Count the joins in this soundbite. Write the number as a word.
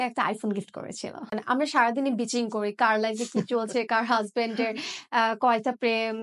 one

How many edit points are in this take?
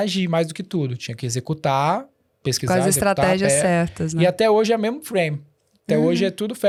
zero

